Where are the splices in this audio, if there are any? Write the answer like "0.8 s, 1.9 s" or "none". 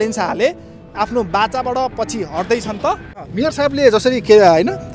3.1 s